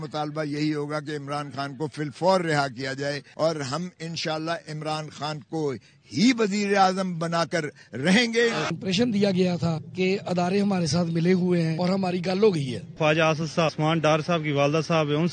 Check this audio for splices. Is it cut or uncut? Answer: cut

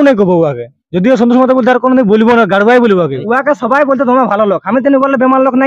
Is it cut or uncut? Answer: cut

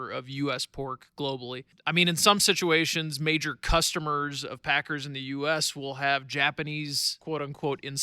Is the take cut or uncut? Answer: cut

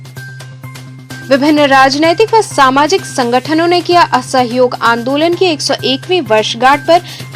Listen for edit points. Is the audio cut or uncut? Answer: cut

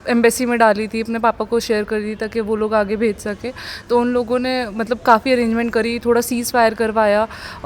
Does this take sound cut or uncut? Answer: uncut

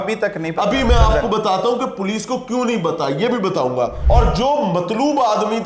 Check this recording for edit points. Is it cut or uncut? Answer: cut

